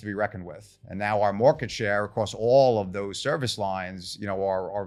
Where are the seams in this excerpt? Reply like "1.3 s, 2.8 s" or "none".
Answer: none

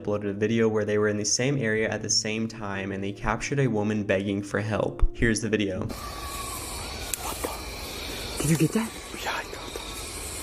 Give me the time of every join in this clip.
none

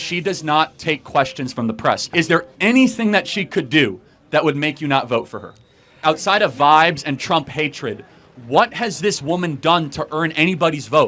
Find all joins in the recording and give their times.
2.1 s, 6.0 s

